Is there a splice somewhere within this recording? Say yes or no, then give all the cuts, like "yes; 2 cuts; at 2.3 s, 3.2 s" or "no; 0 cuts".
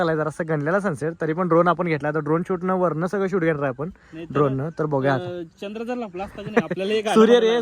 no; 0 cuts